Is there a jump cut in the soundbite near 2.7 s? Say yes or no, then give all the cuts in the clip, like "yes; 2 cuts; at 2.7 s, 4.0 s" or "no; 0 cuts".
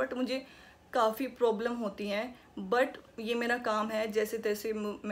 no; 0 cuts